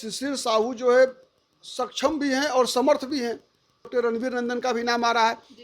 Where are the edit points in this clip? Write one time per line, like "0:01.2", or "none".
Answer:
0:03.9